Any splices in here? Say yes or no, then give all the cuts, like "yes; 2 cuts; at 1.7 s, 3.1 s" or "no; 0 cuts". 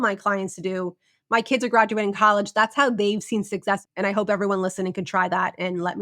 yes; 1 cut; at 3.8 s